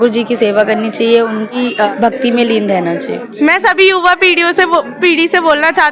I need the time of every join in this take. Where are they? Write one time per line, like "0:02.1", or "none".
0:01.6
0:03.2